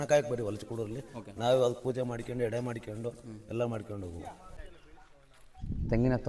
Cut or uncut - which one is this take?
cut